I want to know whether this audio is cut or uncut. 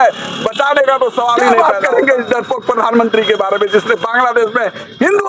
cut